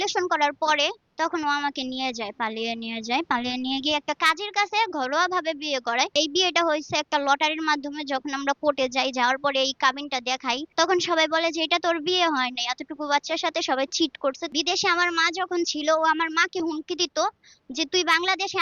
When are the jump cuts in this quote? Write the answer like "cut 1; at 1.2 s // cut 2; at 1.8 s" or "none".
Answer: cut 1; at 1.0 s // cut 2; at 6.1 s // cut 3; at 10.7 s // cut 4; at 14.5 s